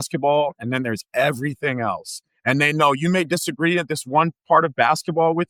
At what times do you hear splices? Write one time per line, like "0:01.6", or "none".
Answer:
none